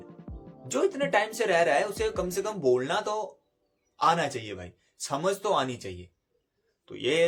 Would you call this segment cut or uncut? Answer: uncut